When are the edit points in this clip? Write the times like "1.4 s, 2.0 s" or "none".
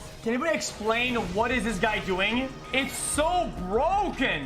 2.6 s